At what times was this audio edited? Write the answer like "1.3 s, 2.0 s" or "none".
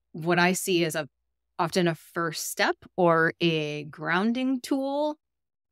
none